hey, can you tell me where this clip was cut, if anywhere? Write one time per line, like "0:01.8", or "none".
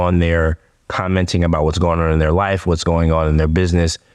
none